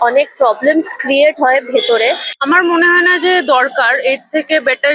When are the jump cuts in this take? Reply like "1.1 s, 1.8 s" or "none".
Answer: 2.3 s